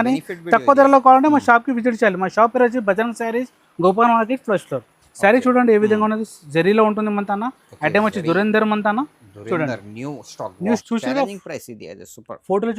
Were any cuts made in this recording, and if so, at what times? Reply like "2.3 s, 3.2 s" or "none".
10.8 s